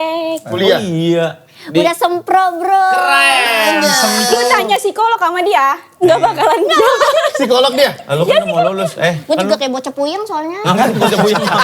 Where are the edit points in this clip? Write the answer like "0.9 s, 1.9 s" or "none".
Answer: none